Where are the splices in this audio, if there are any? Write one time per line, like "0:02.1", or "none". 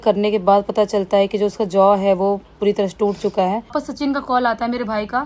0:03.8